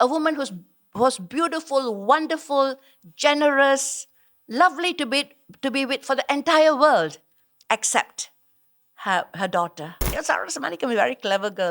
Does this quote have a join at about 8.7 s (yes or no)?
no